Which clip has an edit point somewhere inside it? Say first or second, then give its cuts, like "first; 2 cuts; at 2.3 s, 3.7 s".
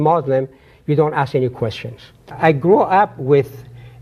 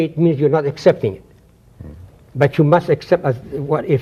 first; 1 cut; at 2.3 s